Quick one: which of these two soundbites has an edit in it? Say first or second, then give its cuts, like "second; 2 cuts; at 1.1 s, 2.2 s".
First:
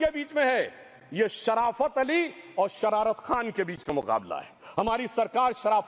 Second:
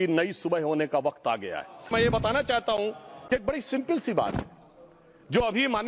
second; 1 cut; at 1.9 s